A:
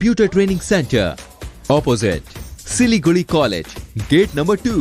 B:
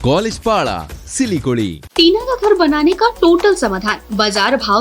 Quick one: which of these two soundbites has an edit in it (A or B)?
B